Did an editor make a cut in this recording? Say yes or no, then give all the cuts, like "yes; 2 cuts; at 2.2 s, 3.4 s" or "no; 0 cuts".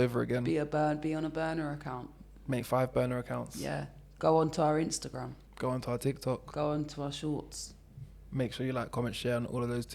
yes; 1 cut; at 5.4 s